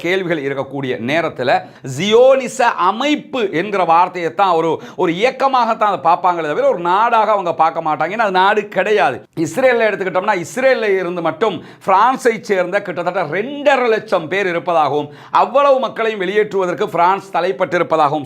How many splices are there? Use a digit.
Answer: 2